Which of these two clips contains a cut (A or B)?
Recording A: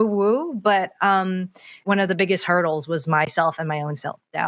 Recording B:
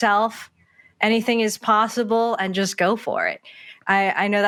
A